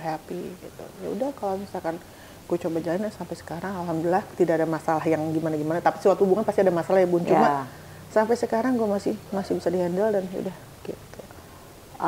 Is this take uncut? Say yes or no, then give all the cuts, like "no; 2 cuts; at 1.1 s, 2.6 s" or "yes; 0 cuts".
yes; 0 cuts